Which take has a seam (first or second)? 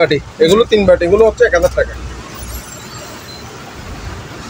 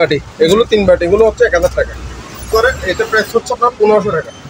second